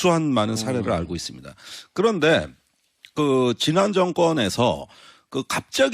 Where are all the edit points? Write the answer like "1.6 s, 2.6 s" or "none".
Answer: none